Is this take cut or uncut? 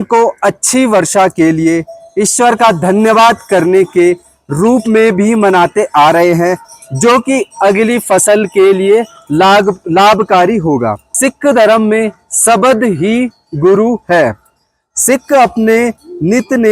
uncut